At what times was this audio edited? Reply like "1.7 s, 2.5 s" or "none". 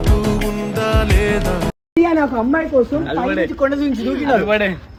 none